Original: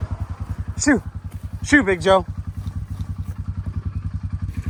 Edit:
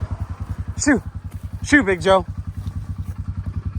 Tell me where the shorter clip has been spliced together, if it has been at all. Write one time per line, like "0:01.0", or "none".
0:02.8